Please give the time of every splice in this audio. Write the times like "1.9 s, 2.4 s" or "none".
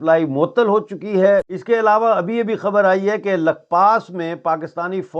1.5 s